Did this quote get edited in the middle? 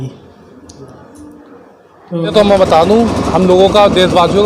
yes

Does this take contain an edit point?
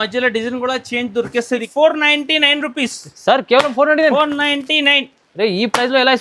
yes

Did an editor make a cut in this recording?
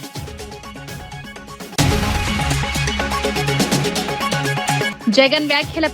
yes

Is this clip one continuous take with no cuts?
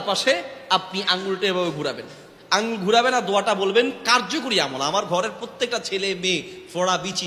no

